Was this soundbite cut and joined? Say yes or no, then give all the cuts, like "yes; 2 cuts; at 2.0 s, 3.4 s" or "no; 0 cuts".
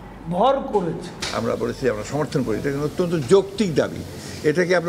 yes; 1 cut; at 1.1 s